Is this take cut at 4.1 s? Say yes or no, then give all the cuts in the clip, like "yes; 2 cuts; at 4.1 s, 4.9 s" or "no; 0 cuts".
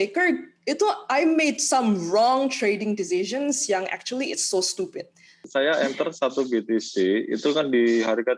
no; 1 cut; at 5.4 s